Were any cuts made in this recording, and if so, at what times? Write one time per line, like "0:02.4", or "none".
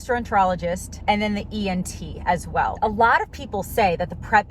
0:00.9
0:02.8